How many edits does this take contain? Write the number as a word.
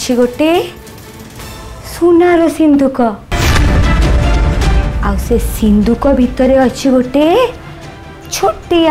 zero